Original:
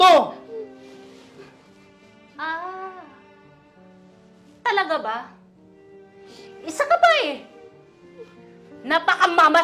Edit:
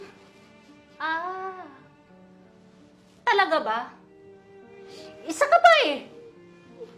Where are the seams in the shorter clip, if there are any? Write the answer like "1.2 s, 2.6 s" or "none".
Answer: none